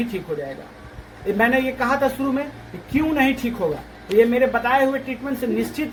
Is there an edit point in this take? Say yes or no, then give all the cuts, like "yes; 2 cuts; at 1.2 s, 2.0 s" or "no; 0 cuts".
no; 0 cuts